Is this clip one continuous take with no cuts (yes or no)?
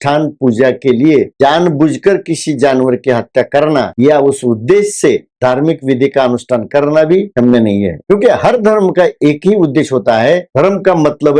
yes